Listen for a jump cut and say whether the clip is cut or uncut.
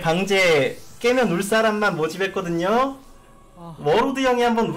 uncut